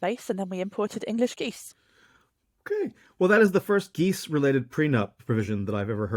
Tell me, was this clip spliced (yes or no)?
no